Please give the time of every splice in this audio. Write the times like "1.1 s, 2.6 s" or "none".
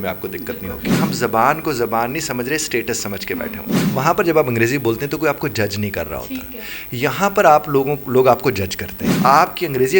1.0 s, 3.7 s, 9.2 s